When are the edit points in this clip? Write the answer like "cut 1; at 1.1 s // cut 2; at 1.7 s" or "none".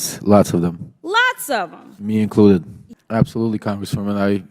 cut 1; at 2.8 s